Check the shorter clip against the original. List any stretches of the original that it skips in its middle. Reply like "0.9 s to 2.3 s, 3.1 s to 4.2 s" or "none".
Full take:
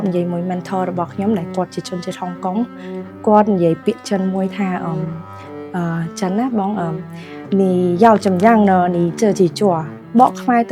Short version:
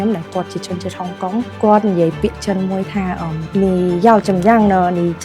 2.7 s to 3.2 s, 5.0 s to 7.3 s